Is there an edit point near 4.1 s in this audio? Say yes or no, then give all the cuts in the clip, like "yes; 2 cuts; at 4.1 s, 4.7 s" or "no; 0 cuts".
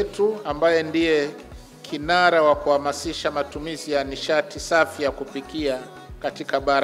no; 0 cuts